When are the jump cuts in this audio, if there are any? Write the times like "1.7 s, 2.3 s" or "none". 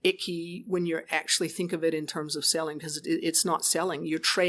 none